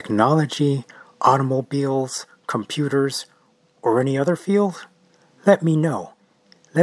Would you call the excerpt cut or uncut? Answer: uncut